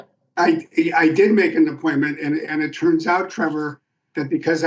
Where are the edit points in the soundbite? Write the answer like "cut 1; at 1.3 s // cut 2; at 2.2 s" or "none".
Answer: none